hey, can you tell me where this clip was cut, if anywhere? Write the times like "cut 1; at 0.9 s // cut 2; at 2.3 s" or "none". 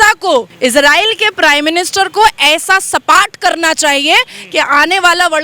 none